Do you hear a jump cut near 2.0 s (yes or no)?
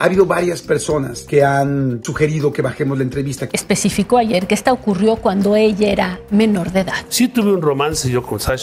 yes